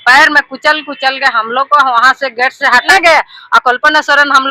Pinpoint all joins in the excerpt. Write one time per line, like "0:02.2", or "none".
0:02.9